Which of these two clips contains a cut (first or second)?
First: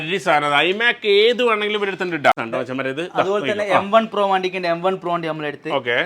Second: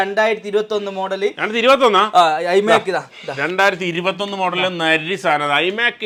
first